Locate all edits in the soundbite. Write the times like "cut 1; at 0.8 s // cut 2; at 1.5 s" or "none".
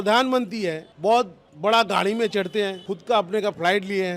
cut 1; at 0.9 s // cut 2; at 1.4 s // cut 3; at 2.9 s